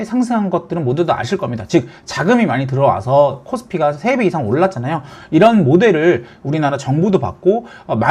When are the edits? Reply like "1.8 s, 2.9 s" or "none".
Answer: none